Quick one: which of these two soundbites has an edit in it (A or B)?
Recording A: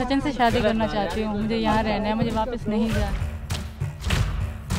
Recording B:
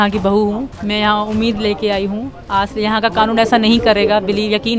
A